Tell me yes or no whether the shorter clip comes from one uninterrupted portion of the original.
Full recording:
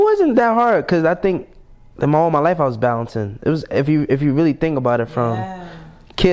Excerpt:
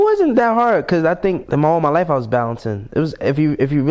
no